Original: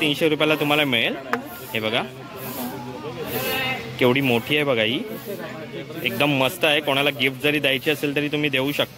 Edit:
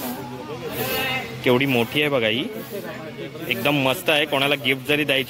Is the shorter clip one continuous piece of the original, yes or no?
yes